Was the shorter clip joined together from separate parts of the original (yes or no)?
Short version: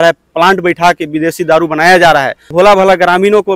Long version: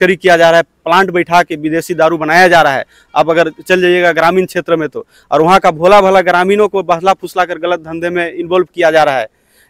yes